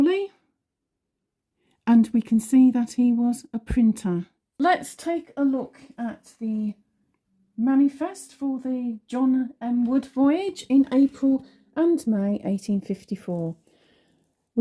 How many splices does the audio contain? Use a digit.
1